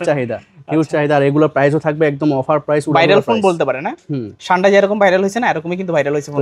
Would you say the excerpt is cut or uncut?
uncut